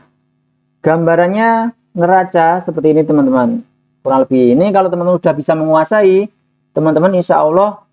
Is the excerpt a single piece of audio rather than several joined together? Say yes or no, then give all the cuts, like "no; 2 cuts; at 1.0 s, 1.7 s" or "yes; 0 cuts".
yes; 0 cuts